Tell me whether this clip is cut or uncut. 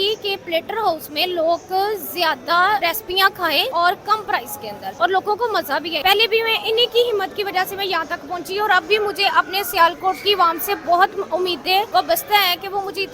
cut